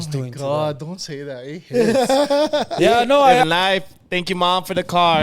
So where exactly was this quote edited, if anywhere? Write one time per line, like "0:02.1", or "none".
0:03.4

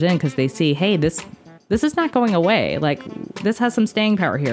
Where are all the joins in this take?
none

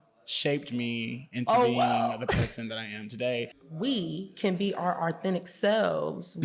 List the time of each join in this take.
0:03.6

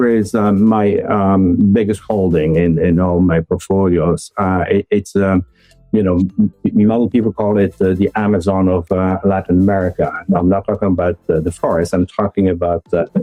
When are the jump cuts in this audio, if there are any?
none

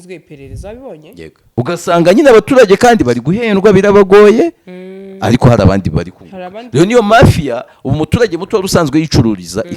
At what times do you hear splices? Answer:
0:01.6

